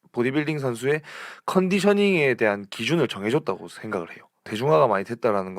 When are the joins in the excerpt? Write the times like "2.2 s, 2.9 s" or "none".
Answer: 4.4 s